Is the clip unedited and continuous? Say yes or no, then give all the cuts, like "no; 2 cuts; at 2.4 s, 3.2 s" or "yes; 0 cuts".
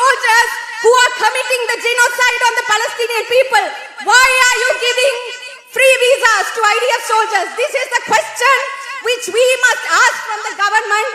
yes; 0 cuts